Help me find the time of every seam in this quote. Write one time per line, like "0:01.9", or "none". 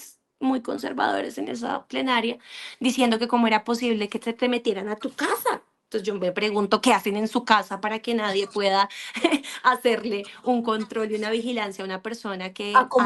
none